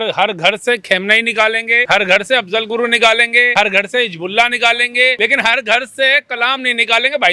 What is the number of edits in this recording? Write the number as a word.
three